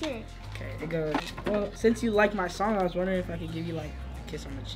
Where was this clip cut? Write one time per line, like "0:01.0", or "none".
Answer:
0:01.3